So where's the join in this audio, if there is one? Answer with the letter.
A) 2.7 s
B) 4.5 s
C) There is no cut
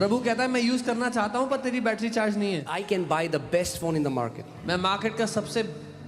A